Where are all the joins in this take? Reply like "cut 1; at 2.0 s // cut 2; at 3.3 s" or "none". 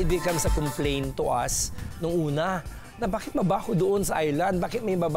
none